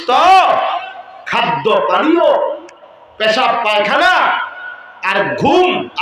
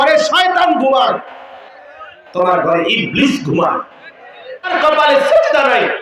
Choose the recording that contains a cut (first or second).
second